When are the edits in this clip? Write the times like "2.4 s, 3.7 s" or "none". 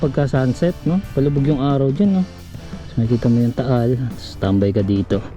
none